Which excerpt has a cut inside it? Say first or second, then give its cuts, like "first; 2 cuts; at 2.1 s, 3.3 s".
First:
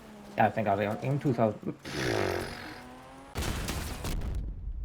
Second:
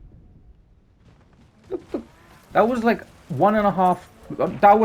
first; 1 cut; at 3.3 s